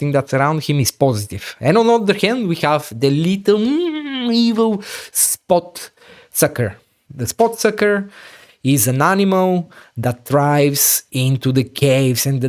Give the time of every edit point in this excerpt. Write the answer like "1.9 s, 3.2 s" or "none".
none